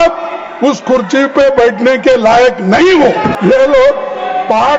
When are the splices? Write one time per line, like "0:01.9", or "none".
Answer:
0:03.3